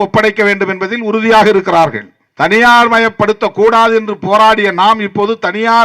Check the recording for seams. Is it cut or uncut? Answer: uncut